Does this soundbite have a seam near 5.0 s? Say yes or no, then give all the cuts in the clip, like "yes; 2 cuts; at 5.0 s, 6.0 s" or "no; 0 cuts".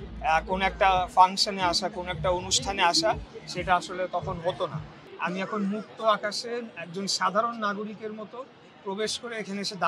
yes; 1 cut; at 5.0 s